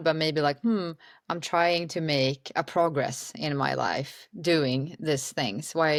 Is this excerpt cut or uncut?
uncut